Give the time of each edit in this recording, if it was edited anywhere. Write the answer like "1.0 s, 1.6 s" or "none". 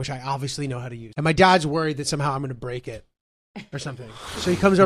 1.0 s